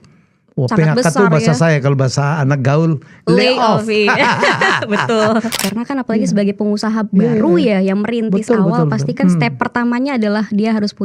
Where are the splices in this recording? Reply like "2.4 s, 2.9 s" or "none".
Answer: 5.6 s

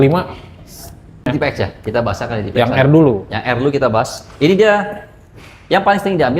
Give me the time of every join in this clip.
1.3 s

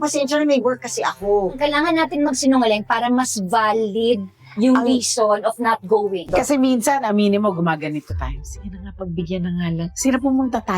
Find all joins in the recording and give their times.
6.2 s

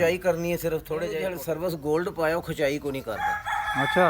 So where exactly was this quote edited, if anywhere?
1.2 s

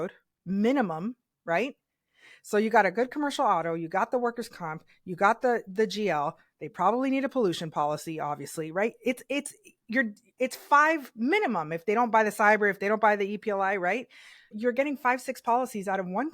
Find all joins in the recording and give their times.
14.5 s

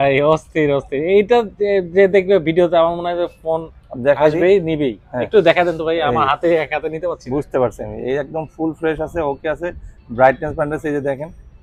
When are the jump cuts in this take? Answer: none

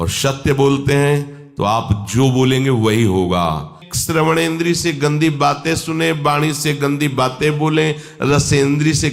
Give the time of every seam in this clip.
3.9 s

